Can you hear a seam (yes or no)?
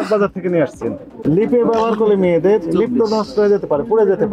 yes